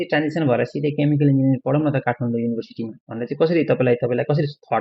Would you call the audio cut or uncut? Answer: uncut